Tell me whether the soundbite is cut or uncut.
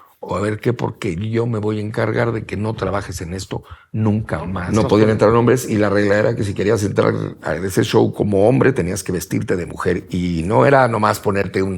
cut